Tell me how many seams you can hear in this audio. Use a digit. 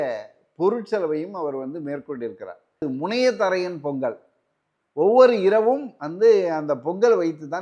1